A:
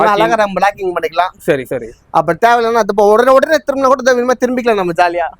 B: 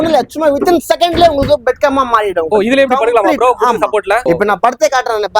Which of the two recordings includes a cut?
B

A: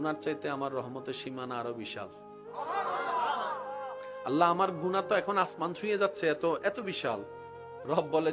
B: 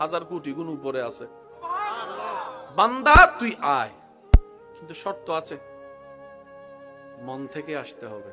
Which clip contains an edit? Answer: B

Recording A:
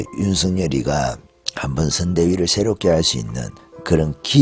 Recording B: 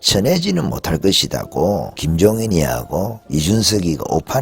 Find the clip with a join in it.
B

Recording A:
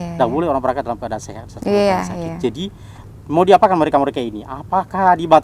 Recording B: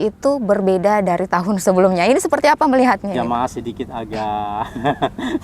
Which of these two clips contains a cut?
B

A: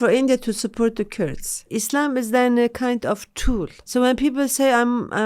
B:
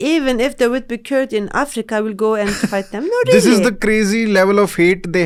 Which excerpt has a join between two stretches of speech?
A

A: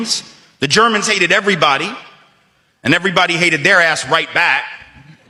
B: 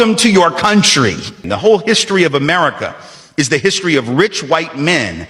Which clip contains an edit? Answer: B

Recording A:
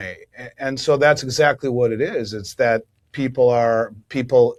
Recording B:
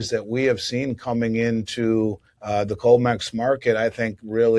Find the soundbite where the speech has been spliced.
B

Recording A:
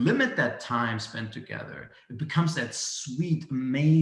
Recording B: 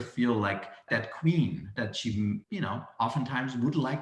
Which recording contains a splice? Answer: B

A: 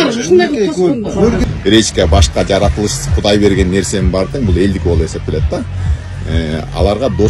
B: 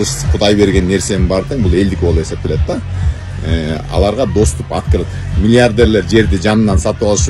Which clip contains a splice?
A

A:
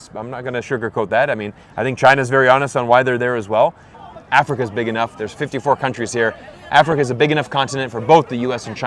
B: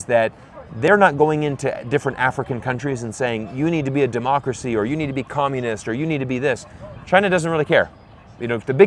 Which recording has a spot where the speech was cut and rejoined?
A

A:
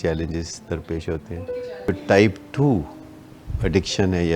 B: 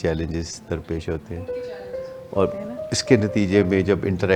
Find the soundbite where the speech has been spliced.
A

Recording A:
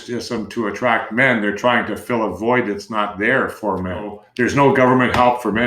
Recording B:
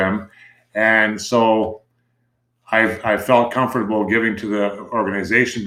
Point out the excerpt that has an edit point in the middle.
A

